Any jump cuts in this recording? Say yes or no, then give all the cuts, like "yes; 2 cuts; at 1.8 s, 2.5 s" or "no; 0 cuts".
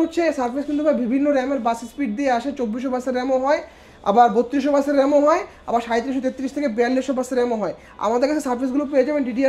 no; 0 cuts